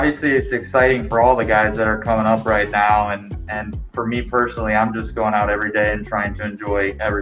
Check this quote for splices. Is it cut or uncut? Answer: uncut